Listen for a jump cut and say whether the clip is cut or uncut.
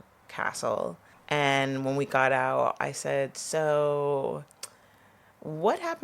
cut